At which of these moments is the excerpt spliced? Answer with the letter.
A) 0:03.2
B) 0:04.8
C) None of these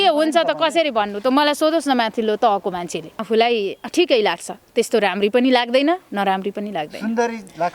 A